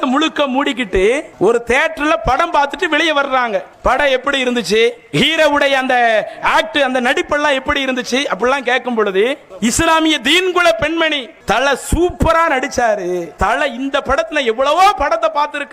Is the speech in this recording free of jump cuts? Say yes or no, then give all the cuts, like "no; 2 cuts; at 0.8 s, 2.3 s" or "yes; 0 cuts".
no; 6 cuts; at 1.3 s, 3.7 s, 5.0 s, 9.5 s, 11.3 s, 13.3 s